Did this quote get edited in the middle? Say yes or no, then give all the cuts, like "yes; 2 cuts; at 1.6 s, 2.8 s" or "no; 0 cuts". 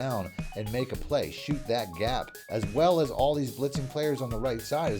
yes; 1 cut; at 2.4 s